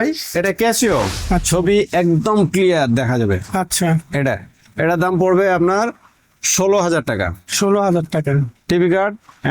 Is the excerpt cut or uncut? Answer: cut